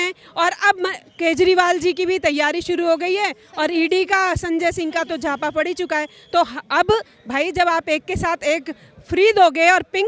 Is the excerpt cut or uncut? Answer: uncut